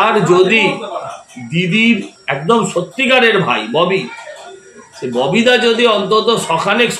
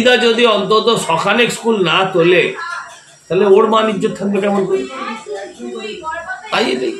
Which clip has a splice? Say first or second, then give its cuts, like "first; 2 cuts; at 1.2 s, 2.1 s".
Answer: first; 1 cut; at 2.1 s